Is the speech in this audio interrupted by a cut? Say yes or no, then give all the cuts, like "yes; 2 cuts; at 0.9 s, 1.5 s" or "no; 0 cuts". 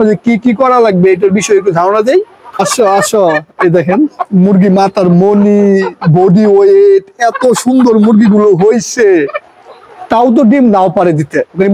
yes; 2 cuts; at 2.6 s, 9.4 s